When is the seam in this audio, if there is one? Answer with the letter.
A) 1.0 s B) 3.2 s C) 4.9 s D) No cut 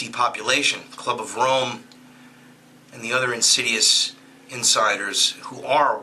C